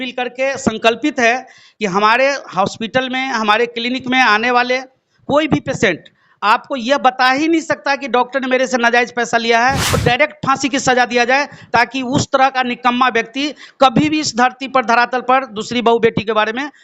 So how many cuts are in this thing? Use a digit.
1